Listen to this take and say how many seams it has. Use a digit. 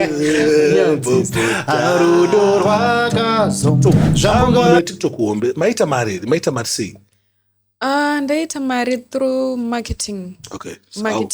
1